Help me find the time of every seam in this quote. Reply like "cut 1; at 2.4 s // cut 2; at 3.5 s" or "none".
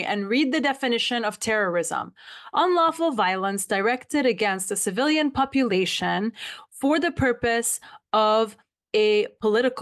none